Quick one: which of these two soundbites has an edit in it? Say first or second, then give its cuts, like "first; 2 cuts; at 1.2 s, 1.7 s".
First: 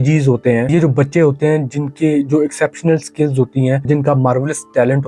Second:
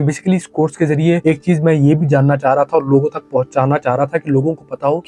first; 1 cut; at 3.9 s